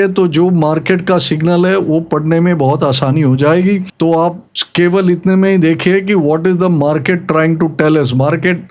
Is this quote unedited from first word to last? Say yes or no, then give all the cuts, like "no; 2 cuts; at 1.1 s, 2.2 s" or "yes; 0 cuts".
yes; 0 cuts